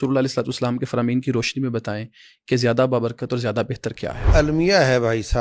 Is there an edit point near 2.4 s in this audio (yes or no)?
no